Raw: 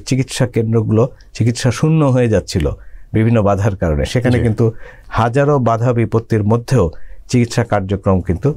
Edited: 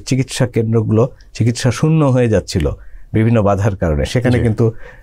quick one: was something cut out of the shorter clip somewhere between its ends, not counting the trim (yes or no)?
no